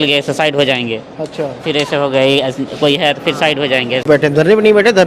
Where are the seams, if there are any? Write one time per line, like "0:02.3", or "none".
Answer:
0:04.0